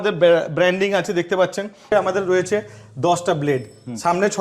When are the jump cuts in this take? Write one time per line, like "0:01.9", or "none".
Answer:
0:01.9